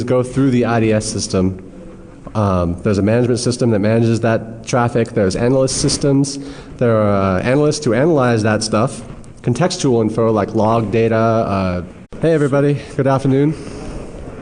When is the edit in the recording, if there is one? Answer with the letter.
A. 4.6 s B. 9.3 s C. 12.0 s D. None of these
D